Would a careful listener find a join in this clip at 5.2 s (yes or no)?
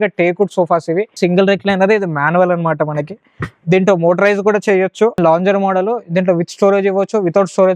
yes